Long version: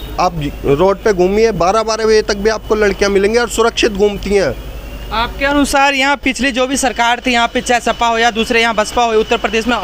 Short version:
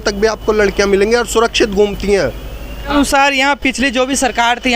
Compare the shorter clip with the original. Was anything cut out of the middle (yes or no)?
yes